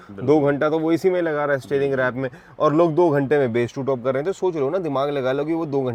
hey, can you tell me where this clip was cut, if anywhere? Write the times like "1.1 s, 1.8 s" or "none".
none

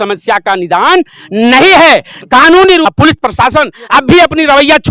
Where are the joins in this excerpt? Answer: 2.9 s

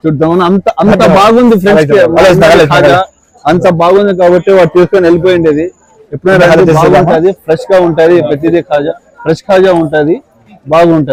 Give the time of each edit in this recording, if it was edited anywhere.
none

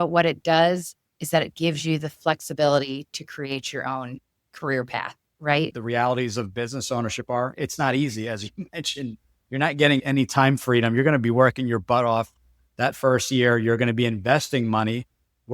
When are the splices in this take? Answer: 5.7 s

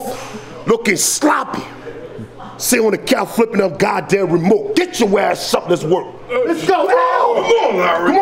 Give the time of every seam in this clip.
6.2 s

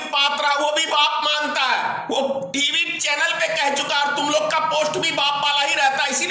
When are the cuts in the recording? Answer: none

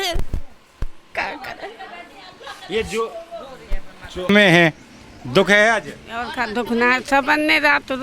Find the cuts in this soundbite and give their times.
4.3 s

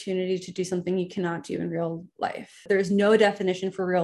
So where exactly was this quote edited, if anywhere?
2.7 s

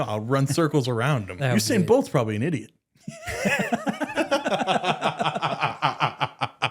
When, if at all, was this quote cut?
1.4 s

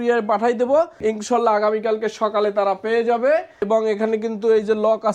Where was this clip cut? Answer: 0.9 s, 3.6 s

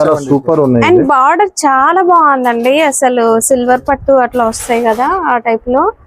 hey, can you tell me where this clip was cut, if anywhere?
none

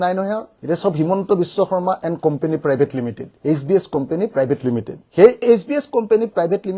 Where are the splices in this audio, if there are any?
none

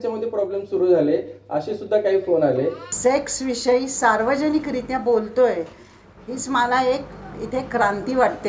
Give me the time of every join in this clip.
2.9 s

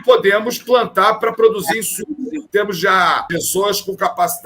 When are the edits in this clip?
2.4 s, 3.3 s

